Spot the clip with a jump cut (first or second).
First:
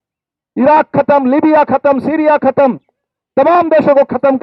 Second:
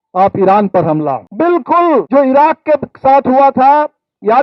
second